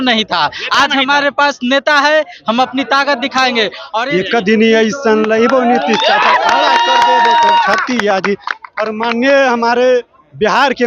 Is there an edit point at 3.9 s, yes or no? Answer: yes